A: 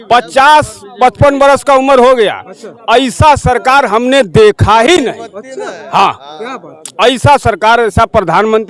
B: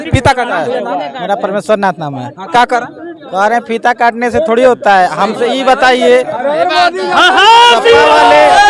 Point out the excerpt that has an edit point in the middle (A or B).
B